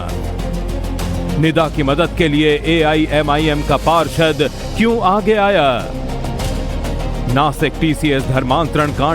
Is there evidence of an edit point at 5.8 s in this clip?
no; 1 cut; at 2.9 s

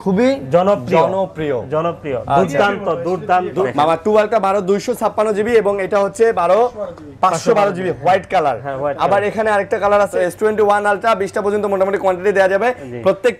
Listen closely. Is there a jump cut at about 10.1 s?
yes; 2 cuts; at 3.7 s, 10.1 s

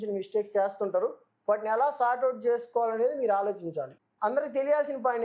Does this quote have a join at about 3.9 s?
yes; 1 cut; at 3.9 s

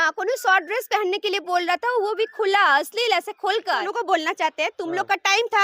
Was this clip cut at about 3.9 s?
yes; 1 cut; at 3.9 s

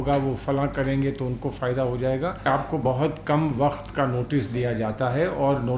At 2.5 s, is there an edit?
yes; 1 cut; at 2.5 s

